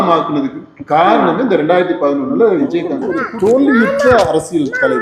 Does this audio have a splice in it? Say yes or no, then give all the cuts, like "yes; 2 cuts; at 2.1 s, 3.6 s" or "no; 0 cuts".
yes; 1 cut; at 3.1 s